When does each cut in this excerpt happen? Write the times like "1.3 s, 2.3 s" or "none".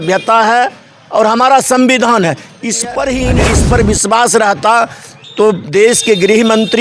3.4 s